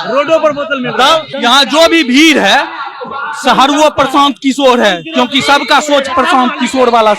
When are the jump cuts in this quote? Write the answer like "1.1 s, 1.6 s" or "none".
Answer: 1.3 s